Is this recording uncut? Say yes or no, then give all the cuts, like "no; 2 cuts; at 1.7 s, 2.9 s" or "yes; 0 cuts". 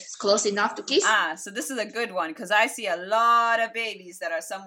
no; 1 cut; at 1.0 s